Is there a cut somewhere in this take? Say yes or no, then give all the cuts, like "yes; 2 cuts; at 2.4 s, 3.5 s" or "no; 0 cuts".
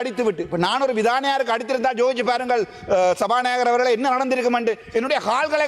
no; 0 cuts